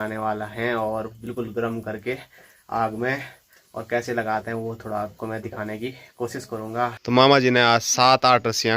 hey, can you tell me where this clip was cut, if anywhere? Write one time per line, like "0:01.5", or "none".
0:07.0